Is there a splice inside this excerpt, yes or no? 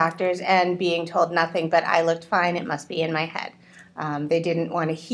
no